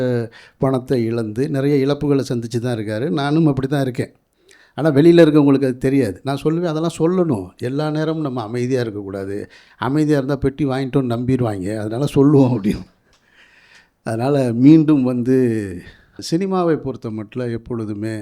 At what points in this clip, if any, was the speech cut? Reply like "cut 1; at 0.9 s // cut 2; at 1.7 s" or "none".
cut 1; at 16.2 s